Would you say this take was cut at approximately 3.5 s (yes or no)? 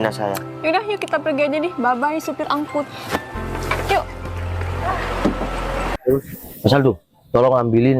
no